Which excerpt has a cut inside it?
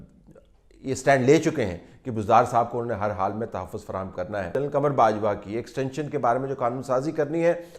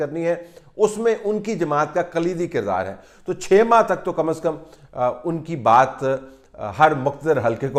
first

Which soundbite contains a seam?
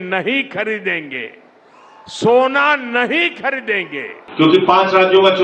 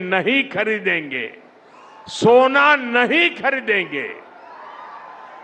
first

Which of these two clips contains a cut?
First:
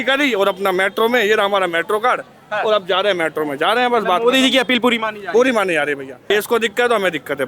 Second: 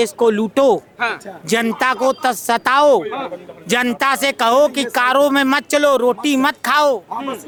first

